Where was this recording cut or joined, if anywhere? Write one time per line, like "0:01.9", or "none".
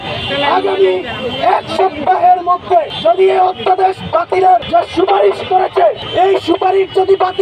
0:02.9
0:04.6
0:06.0